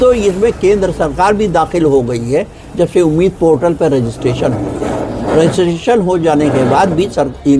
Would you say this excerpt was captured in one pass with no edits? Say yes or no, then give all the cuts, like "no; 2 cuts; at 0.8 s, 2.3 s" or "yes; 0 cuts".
yes; 0 cuts